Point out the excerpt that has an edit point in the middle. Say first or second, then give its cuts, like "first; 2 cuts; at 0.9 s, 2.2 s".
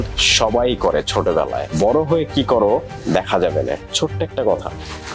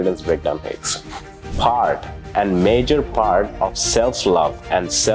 second; 1 cut; at 1.5 s